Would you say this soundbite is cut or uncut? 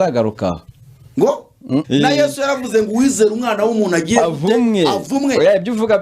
cut